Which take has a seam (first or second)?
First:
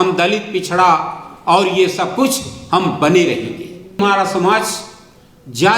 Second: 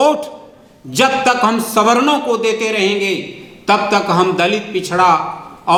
first